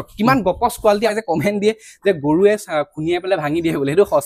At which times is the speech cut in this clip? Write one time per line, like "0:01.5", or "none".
0:01.1